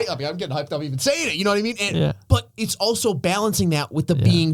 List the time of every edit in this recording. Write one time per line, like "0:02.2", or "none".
none

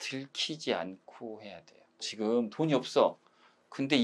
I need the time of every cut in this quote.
0:02.0

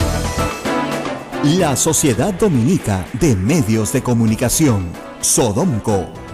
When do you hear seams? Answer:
0:01.2

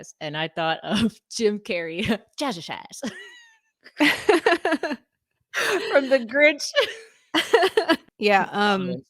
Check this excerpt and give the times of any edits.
0:08.1

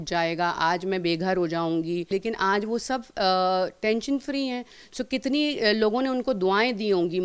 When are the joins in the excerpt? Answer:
0:02.1

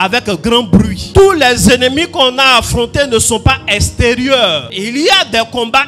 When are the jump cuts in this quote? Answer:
0:01.0
0:04.7

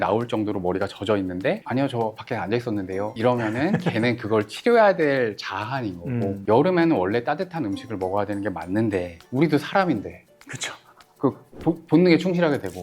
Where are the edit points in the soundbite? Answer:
0:01.6
0:03.1
0:06.4

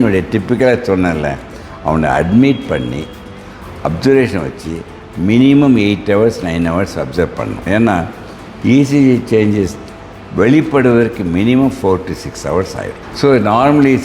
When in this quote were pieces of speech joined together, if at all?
0:07.6
0:13.0

